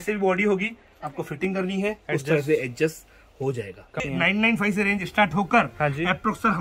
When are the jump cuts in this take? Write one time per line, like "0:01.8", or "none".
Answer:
0:04.0